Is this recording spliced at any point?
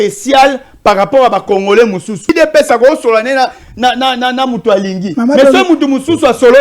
yes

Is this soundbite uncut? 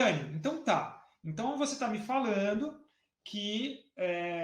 yes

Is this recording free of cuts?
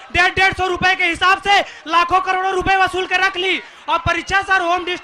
yes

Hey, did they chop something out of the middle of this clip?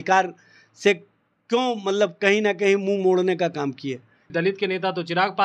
yes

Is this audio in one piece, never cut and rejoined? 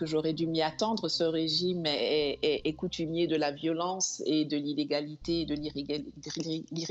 yes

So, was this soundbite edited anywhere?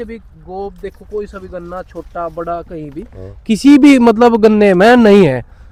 no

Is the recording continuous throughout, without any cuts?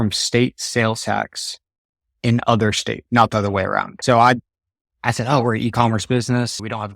no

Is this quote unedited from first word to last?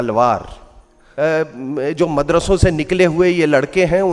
no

